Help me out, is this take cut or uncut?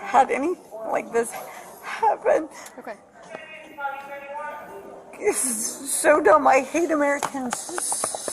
uncut